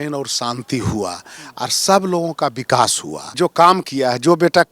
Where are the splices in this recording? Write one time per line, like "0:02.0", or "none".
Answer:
0:03.4